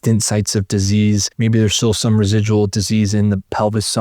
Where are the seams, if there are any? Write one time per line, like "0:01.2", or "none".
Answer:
0:01.3